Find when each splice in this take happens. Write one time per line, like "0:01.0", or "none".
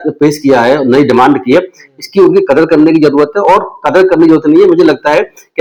none

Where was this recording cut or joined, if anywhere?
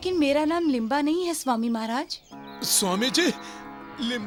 none

